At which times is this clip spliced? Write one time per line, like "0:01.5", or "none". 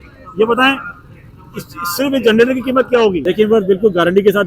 0:03.2